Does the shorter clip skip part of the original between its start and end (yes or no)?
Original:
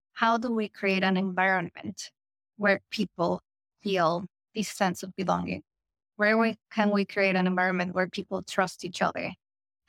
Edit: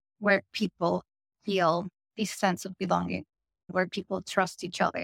yes